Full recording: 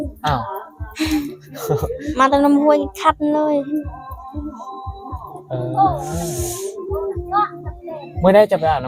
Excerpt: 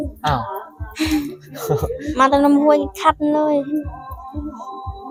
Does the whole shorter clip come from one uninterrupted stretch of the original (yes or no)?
yes